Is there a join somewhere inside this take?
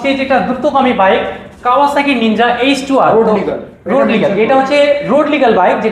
no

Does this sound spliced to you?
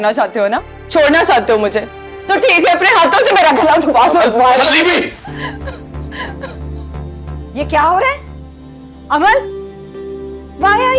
no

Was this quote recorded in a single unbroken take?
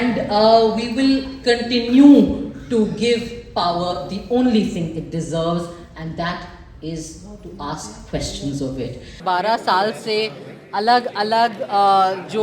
no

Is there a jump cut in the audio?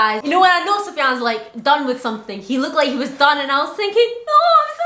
no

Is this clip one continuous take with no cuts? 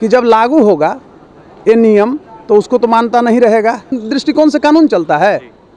no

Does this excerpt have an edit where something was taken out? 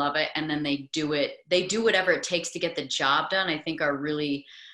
no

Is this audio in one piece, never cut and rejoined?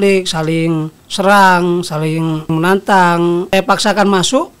no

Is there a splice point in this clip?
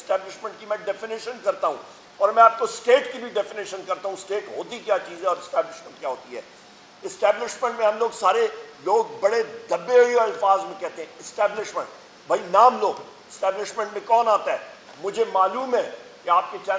no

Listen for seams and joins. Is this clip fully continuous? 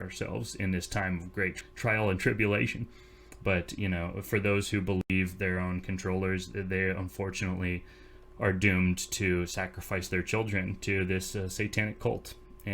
no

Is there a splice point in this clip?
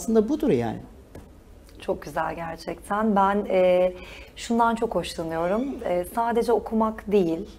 no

